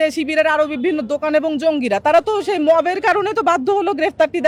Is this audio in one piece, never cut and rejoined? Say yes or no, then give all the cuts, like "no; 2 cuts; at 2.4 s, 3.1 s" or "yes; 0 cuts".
yes; 0 cuts